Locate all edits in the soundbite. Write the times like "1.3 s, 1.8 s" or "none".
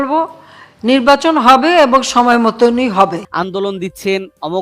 3.3 s